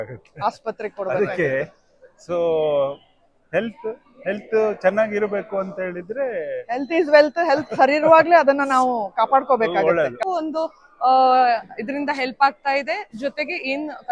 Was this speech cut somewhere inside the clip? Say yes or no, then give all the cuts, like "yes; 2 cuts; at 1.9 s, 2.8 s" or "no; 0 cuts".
yes; 1 cut; at 10.2 s